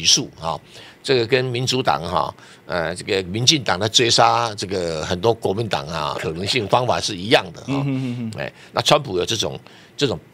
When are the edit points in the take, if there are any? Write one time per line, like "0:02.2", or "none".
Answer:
0:06.1